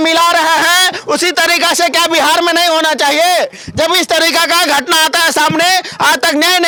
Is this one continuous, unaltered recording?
yes; 0 cuts

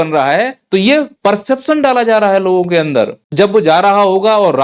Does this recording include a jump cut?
yes; 2 cuts; at 0.7 s, 3.2 s

